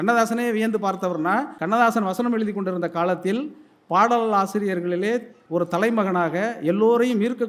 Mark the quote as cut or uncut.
cut